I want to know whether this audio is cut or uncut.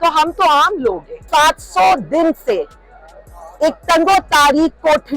cut